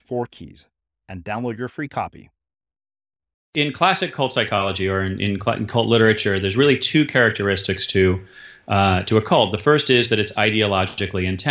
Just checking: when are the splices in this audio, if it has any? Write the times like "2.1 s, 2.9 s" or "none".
3.4 s